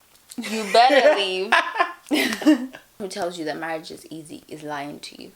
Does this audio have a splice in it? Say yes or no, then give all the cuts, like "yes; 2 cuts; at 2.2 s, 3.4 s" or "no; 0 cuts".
yes; 1 cut; at 3.0 s